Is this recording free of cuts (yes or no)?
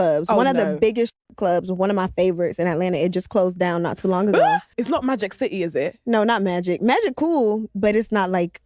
yes